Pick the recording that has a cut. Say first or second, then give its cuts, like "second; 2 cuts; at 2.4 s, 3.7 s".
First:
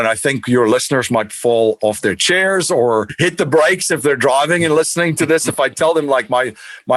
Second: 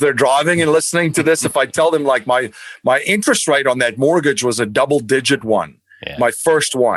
first; 1 cut; at 3.1 s